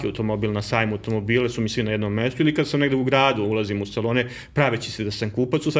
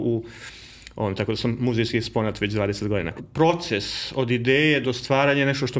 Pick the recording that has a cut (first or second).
second